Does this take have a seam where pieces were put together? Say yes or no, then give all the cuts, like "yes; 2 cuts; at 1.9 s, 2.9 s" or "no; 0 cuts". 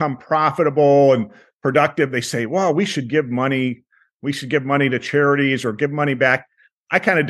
no; 0 cuts